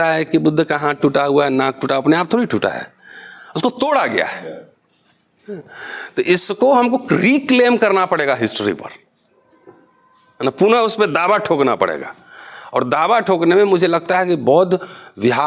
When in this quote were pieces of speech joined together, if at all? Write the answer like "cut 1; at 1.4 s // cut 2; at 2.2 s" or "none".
none